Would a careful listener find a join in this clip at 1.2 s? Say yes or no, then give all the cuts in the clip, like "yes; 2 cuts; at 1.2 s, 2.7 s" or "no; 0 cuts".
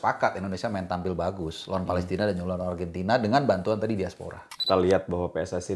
no; 1 cut; at 4.5 s